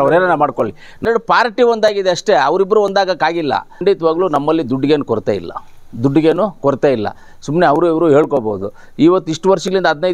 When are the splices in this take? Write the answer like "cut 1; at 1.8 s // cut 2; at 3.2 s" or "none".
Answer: cut 1; at 1.1 s // cut 2; at 3.8 s